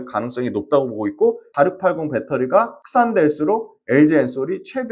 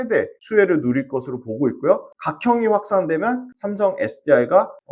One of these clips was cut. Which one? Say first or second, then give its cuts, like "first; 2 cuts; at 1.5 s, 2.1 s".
first; 1 cut; at 1.5 s